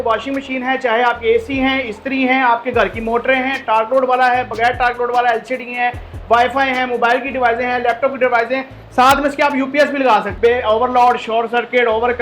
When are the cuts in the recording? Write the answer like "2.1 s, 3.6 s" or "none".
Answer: 10.3 s